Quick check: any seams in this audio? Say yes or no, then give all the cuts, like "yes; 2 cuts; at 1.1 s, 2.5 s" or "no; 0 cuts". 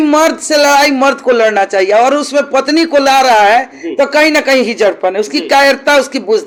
no; 0 cuts